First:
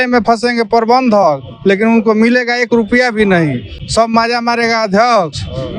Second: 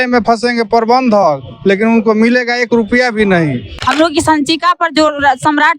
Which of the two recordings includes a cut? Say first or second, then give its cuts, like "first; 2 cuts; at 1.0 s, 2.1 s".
second; 1 cut; at 3.7 s